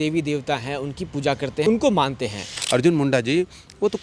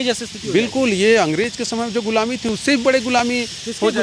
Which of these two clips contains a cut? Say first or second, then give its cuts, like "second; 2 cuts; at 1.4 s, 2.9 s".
first; 2 cuts; at 1.6 s, 2.6 s